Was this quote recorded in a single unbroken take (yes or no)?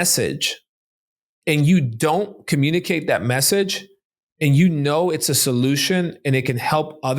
yes